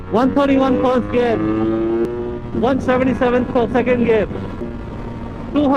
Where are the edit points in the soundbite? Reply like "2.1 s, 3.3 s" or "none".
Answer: 2.1 s, 4.6 s